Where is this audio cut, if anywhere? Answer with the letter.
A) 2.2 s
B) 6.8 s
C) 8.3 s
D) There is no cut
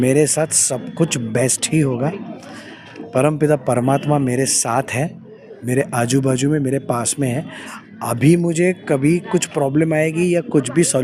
D